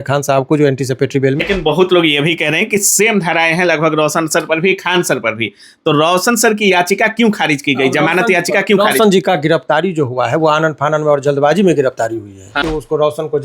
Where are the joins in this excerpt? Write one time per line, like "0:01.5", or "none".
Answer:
0:01.4
0:12.6

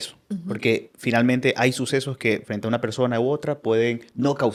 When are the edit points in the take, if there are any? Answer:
none

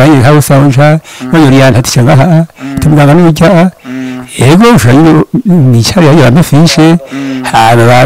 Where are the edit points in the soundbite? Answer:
none

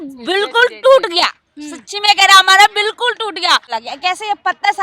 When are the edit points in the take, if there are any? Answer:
0:03.8

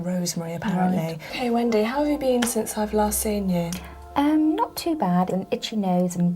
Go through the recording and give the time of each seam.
0:01.3
0:05.3

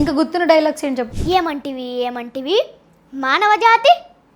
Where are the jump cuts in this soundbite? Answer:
0:01.1

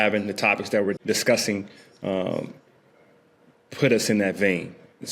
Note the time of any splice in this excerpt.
0:01.0

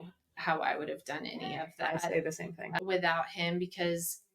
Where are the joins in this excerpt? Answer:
0:02.8

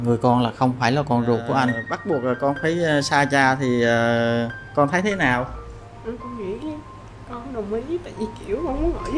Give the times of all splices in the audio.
0:02.0

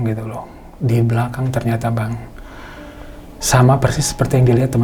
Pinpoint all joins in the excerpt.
none

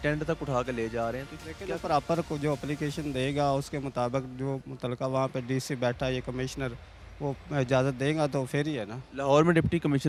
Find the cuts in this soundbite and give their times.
none

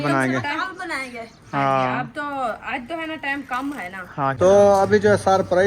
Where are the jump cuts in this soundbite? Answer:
0:04.4

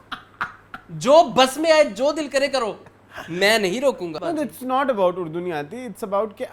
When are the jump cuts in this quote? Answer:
0:04.1

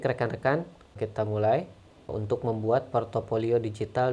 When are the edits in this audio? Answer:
0:00.9
0:02.1

